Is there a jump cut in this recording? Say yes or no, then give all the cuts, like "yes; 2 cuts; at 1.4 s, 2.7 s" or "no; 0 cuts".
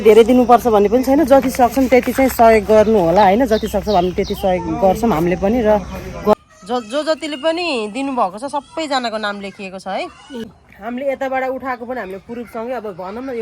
yes; 2 cuts; at 6.3 s, 10.6 s